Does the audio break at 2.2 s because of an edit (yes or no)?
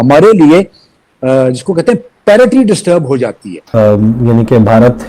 no